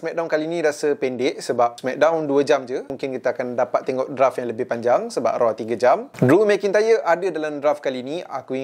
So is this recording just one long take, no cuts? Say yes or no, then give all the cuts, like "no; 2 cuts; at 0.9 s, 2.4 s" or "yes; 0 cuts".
no; 3 cuts; at 1.8 s, 2.9 s, 6.1 s